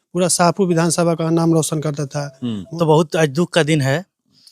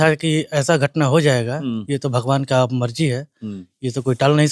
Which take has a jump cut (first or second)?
first